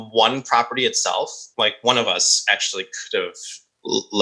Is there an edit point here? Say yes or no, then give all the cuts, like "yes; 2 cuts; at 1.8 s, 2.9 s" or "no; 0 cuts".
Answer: yes; 1 cut; at 1.4 s